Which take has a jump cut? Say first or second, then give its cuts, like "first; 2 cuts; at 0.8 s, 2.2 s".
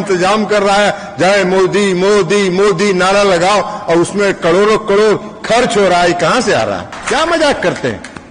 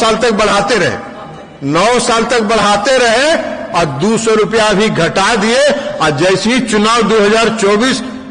first; 1 cut; at 6.9 s